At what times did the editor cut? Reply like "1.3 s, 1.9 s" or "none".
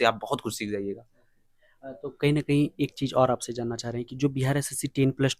none